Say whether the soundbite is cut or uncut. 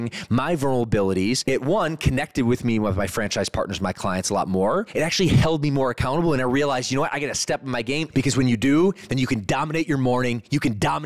cut